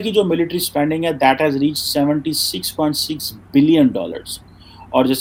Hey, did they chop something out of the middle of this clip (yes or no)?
no